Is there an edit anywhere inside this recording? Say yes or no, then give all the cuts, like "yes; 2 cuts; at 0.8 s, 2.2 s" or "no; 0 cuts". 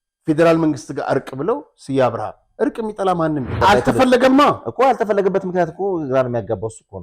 yes; 1 cut; at 3.6 s